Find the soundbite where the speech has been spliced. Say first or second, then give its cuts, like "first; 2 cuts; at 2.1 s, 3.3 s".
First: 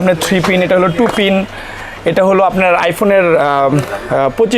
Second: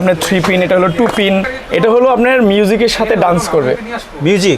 second; 1 cut; at 1.6 s